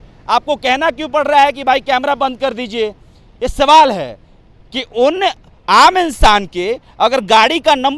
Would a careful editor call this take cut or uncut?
uncut